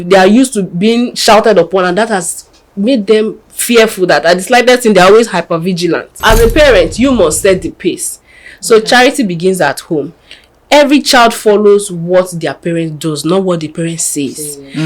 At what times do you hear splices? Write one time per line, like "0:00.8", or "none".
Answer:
0:06.1